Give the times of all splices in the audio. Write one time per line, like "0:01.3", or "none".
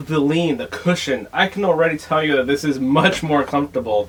none